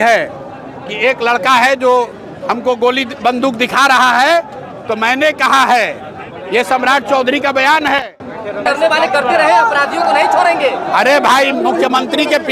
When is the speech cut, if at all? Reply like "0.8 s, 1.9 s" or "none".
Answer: 8.6 s